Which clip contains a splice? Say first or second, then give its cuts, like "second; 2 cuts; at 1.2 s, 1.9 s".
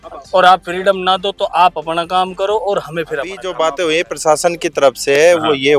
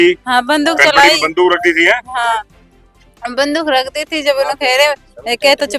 first; 1 cut; at 3.5 s